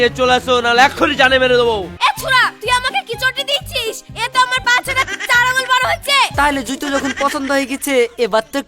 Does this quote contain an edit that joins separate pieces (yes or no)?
yes